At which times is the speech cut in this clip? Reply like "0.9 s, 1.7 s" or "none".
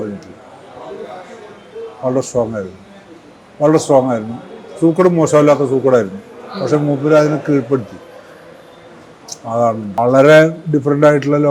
10.0 s